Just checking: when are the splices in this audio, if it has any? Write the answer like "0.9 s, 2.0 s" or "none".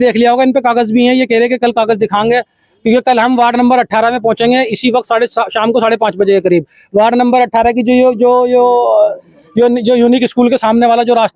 none